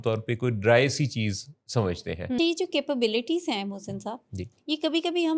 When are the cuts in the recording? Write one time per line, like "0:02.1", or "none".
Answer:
0:02.4